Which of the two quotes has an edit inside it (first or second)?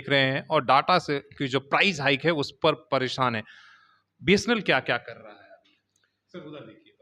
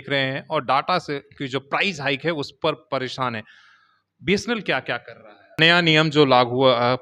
second